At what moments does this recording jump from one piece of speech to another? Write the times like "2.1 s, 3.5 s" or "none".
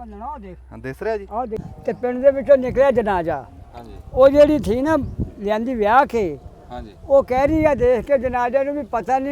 1.6 s